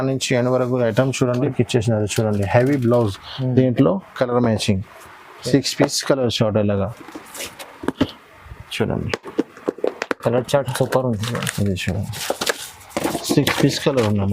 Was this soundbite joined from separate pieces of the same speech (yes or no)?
yes